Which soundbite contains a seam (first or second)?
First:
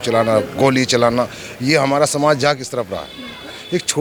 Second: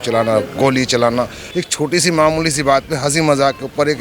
second